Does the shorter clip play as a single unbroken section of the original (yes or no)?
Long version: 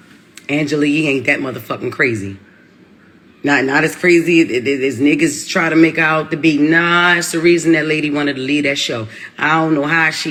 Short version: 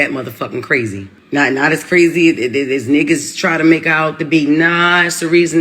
no